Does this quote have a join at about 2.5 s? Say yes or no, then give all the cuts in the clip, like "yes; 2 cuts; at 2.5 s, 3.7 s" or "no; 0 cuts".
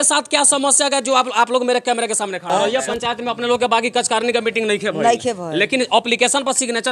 yes; 1 cut; at 2.5 s